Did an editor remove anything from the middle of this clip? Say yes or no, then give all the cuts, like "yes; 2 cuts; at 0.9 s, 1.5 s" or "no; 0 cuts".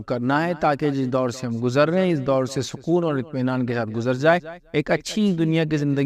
no; 0 cuts